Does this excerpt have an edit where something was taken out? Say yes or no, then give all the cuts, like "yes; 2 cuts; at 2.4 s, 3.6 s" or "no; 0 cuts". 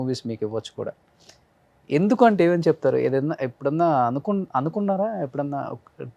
no; 0 cuts